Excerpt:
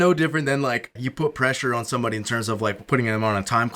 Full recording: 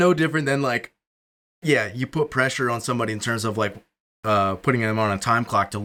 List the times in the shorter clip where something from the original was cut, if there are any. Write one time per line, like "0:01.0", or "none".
0:01.0
0:02.8